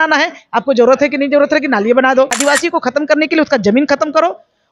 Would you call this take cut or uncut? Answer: cut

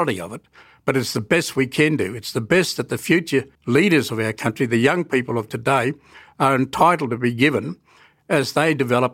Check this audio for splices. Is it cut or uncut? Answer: cut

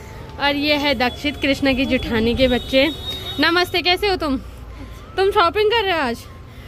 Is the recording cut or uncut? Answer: uncut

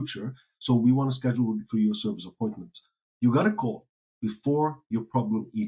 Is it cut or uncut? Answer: uncut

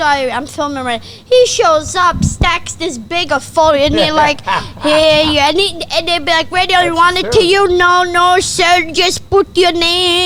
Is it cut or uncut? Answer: uncut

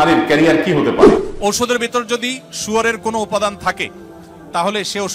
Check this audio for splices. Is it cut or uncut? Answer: cut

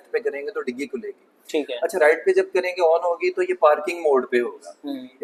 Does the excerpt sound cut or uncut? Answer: uncut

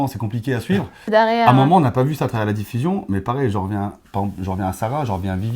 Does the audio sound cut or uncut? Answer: cut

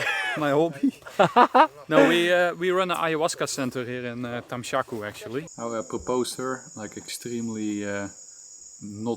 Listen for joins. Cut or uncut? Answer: cut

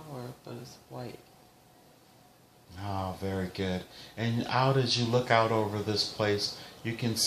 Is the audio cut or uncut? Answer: cut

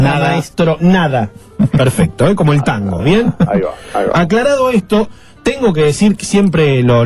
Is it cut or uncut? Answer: cut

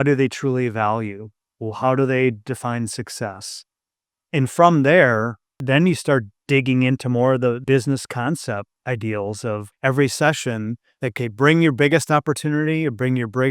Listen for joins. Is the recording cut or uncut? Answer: cut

